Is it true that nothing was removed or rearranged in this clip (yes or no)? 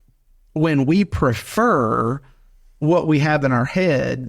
yes